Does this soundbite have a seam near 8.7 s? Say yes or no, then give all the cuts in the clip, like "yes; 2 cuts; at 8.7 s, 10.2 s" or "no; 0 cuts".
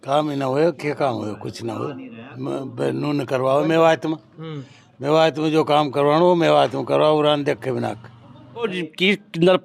yes; 1 cut; at 8.7 s